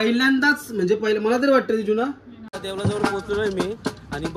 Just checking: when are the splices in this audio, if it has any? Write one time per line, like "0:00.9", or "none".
0:02.6

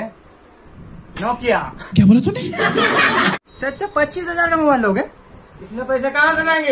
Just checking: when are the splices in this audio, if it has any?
0:03.5

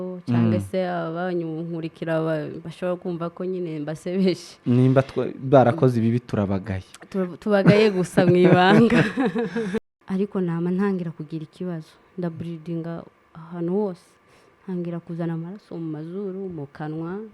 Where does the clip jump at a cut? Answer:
0:09.8

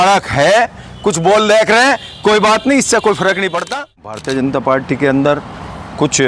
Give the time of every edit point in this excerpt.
0:04.6

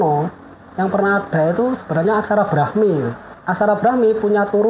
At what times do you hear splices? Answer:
0:03.3

